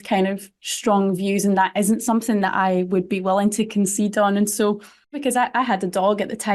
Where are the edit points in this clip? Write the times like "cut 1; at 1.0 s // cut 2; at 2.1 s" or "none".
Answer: cut 1; at 5.2 s